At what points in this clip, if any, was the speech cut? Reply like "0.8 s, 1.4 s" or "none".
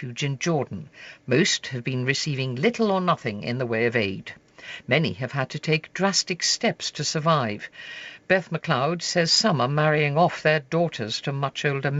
none